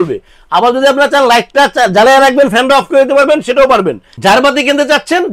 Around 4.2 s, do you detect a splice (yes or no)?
yes